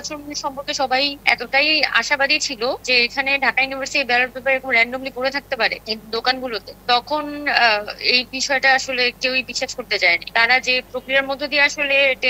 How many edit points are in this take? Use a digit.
1